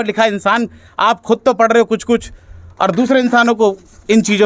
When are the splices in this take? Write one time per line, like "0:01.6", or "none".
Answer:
none